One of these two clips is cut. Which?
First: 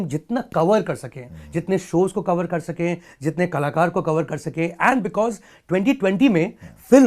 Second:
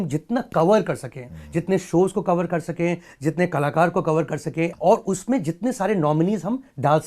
second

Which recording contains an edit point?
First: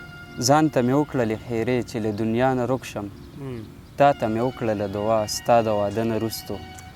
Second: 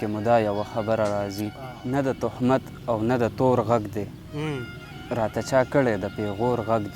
second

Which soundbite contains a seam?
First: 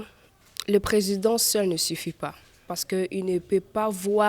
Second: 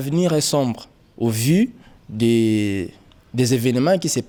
first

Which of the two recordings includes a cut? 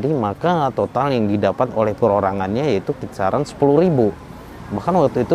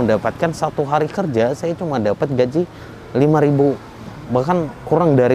second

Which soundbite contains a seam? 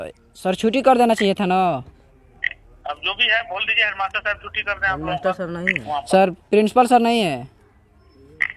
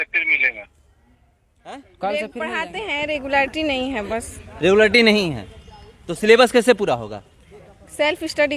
second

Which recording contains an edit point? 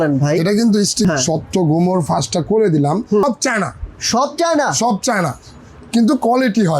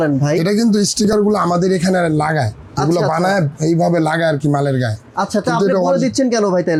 first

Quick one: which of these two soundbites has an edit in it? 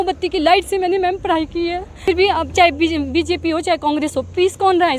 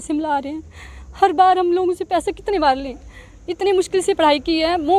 first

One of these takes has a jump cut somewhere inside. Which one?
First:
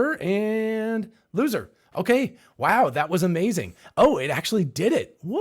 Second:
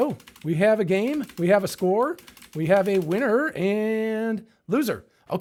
first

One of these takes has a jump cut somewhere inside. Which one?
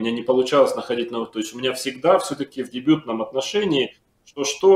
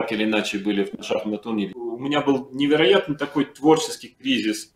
second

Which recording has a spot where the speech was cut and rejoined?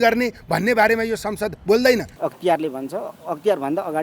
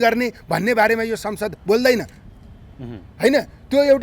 first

